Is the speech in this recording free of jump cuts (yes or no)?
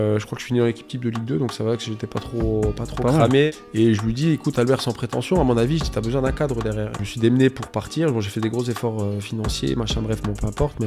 no